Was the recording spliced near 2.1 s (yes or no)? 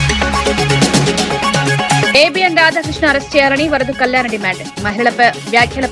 yes